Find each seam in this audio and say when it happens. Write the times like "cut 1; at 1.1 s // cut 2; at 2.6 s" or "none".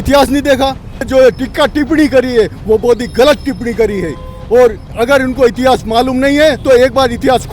cut 1; at 1.1 s

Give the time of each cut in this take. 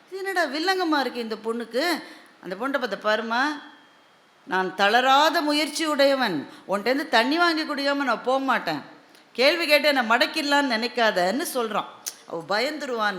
none

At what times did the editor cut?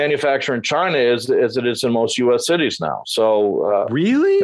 none

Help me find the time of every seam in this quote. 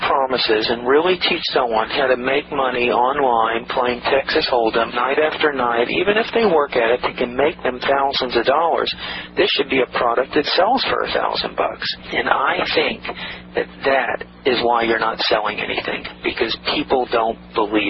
none

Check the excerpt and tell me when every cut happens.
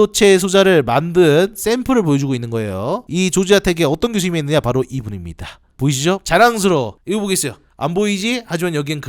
cut 1; at 3.0 s // cut 2; at 7.0 s

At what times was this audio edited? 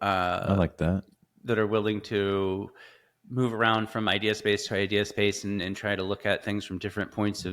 none

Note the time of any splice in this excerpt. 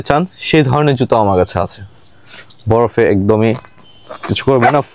none

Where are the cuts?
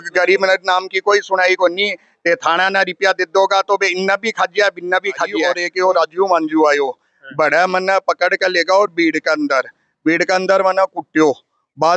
cut 1; at 5.6 s

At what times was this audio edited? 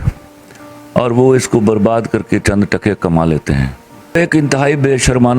cut 1; at 4.1 s

